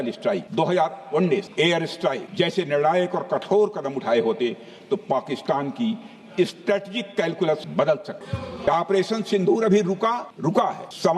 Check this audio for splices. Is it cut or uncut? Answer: cut